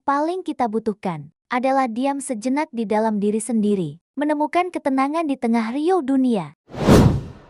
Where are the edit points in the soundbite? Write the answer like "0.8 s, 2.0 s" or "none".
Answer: 6.6 s